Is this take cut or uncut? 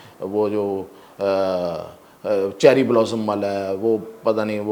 uncut